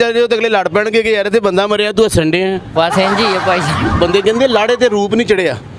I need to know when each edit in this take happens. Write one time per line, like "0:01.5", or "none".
0:03.9